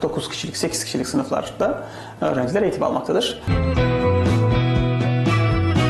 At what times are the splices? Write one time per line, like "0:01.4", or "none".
0:03.5